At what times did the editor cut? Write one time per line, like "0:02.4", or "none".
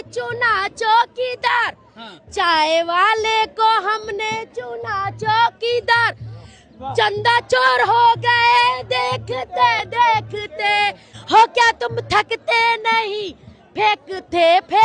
0:11.1